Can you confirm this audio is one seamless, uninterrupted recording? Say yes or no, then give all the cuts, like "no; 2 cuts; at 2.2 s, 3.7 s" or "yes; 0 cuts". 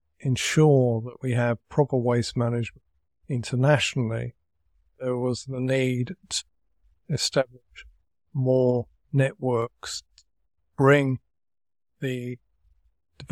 yes; 0 cuts